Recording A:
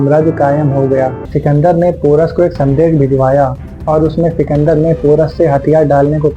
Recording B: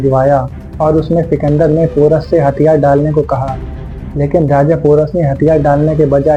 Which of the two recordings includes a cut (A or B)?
A